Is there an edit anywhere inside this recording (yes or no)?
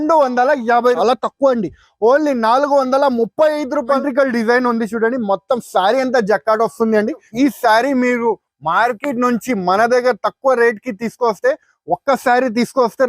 yes